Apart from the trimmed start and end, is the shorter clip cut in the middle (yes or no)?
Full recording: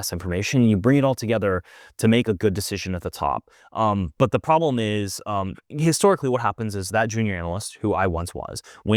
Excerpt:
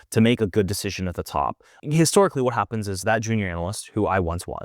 yes